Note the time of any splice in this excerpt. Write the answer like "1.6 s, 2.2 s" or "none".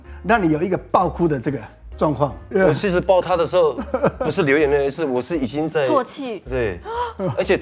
2.4 s